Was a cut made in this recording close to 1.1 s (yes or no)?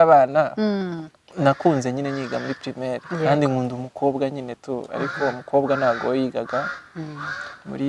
no